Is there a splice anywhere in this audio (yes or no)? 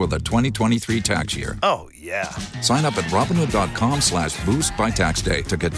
no